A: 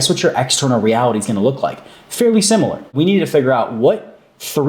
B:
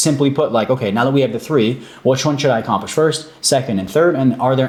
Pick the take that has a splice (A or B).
A